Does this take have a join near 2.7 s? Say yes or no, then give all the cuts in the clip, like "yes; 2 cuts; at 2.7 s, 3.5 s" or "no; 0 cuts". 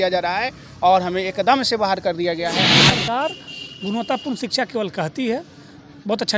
yes; 1 cut; at 2.7 s